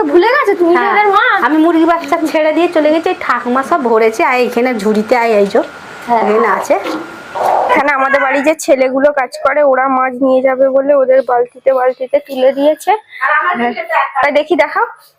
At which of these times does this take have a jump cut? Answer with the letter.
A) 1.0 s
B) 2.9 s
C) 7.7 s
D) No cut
C